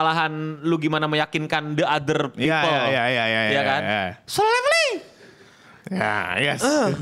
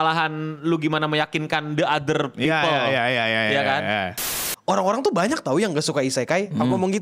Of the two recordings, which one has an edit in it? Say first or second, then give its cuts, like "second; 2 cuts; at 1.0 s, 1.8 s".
second; 1 cut; at 4.3 s